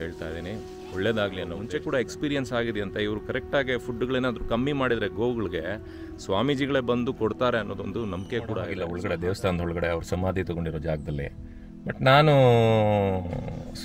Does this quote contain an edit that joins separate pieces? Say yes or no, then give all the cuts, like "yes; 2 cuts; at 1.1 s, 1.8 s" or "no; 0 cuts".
yes; 2 cuts; at 1.6 s, 8.9 s